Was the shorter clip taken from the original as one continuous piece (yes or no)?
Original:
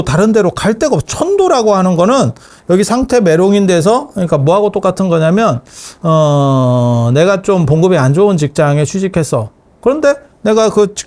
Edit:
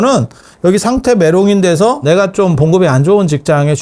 no